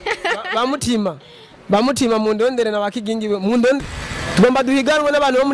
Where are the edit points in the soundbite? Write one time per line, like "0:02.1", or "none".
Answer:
0:03.8